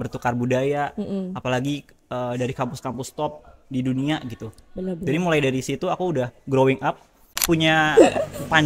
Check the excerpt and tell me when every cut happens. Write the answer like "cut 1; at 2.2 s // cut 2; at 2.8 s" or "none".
cut 1; at 7.4 s